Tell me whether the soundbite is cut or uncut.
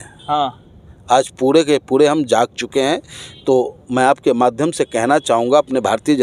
uncut